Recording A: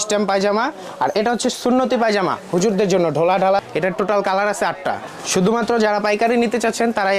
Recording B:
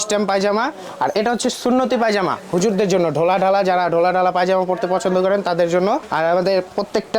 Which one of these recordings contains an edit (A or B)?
A